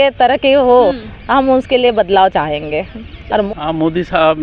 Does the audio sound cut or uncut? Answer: cut